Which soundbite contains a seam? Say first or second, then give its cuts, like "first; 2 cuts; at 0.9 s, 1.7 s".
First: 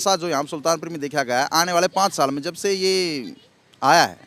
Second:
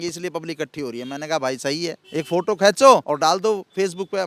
second; 2 cuts; at 2.0 s, 3.0 s